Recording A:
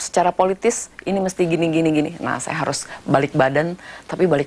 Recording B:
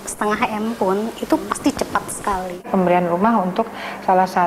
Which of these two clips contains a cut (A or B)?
B